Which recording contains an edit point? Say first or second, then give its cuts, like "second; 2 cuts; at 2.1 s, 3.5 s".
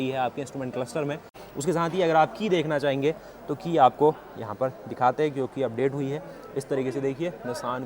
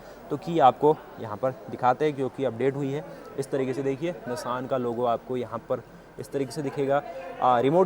first; 1 cut; at 1.4 s